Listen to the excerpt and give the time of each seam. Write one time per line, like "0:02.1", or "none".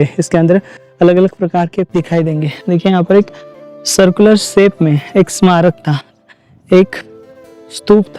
0:01.9